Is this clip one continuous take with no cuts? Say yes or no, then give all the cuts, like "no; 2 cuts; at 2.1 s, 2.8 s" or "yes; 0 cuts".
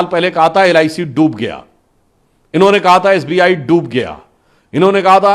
yes; 0 cuts